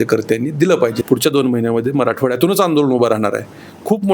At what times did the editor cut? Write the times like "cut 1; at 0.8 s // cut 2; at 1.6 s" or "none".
cut 1; at 1.0 s

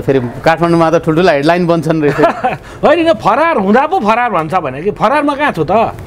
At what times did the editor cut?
none

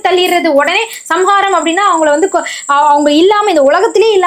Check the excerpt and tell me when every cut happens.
none

